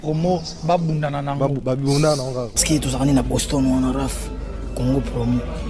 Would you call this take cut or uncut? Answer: uncut